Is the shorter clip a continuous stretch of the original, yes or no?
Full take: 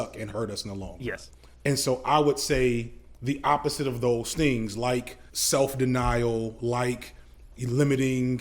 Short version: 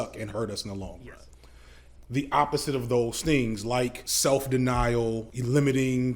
no